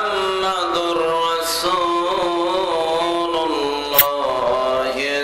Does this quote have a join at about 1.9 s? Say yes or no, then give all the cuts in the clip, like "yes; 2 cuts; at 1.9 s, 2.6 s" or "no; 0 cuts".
no; 1 cut; at 4.0 s